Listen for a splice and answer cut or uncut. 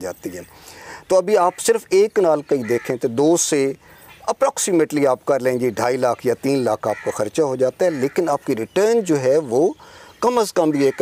uncut